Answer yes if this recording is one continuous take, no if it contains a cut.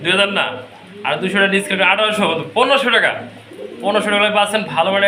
yes